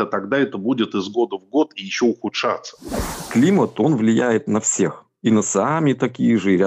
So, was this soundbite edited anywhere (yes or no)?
yes